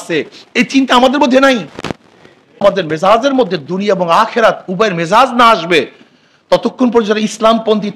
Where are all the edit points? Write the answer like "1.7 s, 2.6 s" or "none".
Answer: 2.6 s